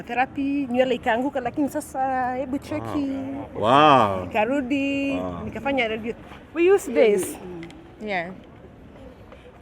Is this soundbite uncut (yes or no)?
no